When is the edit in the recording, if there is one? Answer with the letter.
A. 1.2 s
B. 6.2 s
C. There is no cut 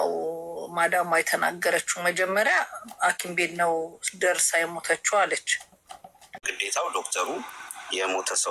B